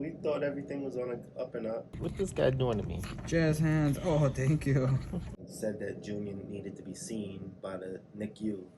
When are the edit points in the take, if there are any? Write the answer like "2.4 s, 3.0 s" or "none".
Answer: 1.9 s, 5.3 s